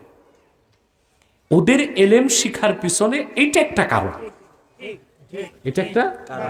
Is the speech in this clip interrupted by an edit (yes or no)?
no